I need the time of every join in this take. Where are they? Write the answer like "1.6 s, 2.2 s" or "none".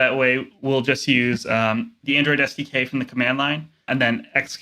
1.9 s, 3.9 s